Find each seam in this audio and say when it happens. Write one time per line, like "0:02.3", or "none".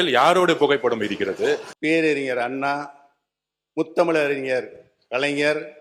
0:01.7